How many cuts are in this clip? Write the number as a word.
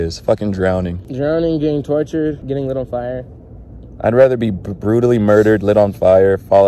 one